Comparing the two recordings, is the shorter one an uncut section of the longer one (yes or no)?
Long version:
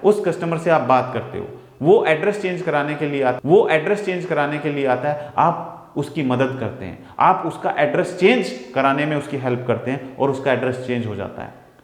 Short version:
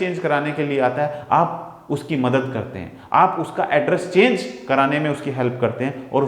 no